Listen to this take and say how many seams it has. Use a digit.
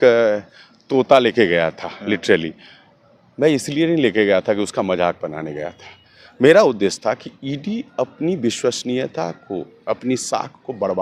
0